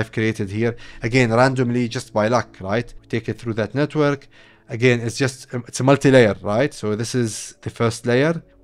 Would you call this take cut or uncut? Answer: cut